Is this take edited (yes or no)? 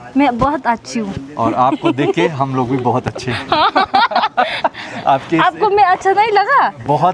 no